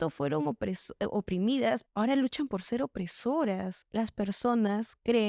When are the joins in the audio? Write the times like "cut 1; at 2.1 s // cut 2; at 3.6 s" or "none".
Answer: cut 1; at 3.8 s